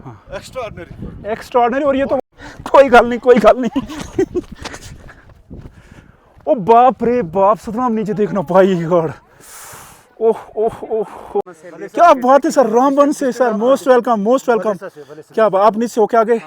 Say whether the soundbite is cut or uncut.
cut